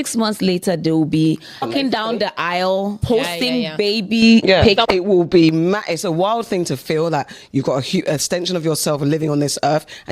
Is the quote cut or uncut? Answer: cut